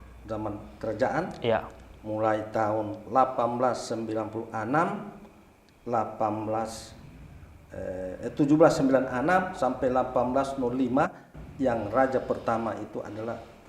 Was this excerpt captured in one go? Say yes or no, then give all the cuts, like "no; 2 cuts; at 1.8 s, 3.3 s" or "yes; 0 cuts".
yes; 0 cuts